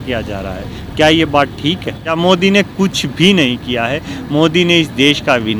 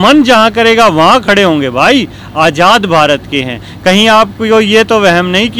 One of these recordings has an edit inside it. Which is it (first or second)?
first